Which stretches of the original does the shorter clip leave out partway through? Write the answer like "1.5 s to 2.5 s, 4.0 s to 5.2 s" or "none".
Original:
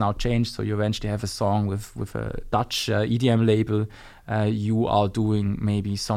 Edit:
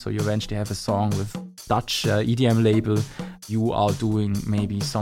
2.0 s to 2.3 s, 4.3 s to 4.6 s